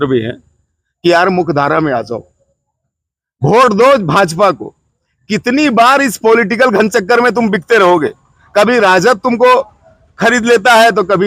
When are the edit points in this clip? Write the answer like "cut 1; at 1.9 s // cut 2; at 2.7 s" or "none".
none